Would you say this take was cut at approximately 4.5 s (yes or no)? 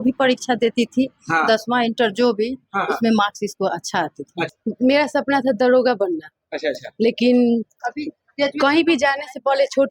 yes